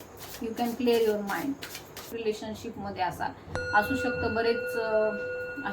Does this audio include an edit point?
yes; 1 cut; at 2.1 s

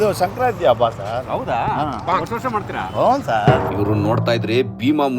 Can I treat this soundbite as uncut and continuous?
no; 1 cut; at 3.7 s

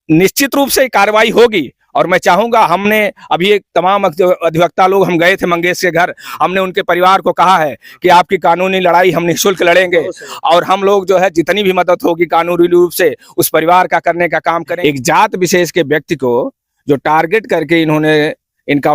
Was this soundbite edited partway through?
yes; 1 cut; at 14.7 s

